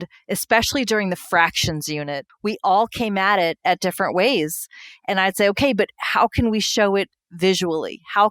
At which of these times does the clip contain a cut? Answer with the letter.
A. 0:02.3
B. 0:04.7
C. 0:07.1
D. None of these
A